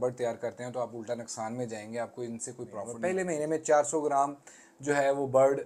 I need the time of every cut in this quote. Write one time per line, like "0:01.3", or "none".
0:02.8